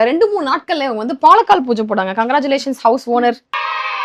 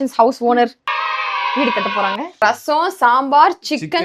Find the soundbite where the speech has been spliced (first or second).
second